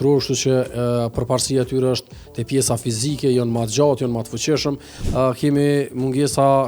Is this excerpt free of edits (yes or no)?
no